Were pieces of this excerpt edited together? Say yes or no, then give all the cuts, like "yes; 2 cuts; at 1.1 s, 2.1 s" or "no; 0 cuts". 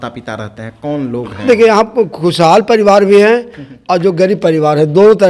no; 0 cuts